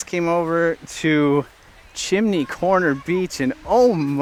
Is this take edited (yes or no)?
no